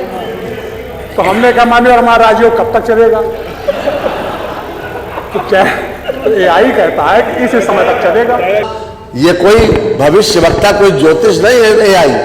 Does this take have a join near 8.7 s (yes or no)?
yes